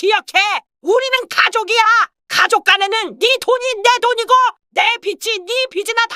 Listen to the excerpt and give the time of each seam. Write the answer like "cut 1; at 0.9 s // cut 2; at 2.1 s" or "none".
none